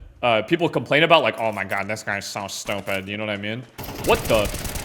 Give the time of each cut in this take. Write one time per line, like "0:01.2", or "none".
none